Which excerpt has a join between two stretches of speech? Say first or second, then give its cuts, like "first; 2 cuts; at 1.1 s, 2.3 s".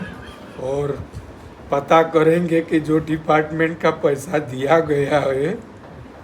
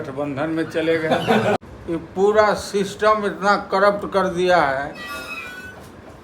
second; 1 cut; at 1.6 s